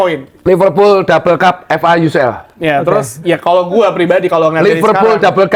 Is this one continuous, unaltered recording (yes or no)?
yes